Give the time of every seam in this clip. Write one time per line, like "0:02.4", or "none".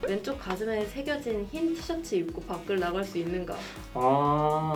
none